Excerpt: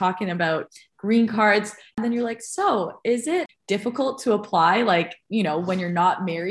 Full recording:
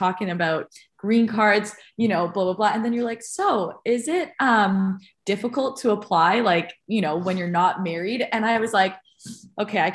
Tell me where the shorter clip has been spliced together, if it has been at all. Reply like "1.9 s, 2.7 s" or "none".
1.9 s, 3.5 s